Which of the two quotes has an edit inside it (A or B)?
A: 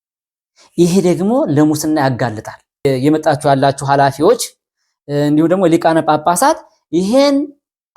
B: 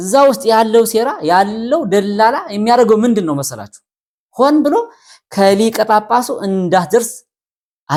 A